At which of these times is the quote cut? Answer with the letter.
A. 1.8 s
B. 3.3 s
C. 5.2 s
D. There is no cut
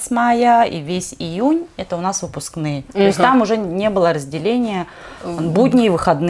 D